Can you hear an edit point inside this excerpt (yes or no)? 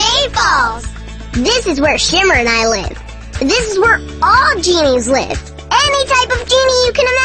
no